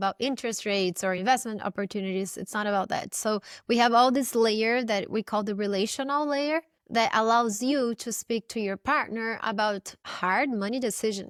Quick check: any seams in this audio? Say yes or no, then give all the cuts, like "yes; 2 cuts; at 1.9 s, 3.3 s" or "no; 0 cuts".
no; 0 cuts